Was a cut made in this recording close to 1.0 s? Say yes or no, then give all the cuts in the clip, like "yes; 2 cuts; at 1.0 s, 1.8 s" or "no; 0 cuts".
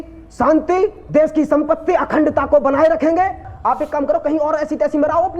no; 1 cut; at 3.5 s